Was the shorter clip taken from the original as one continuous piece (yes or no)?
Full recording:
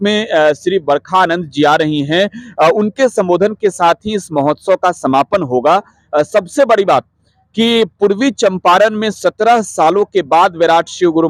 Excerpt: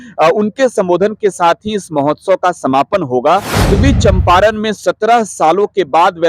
no